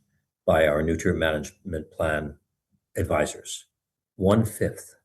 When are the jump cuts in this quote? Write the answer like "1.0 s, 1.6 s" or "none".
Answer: 2.7 s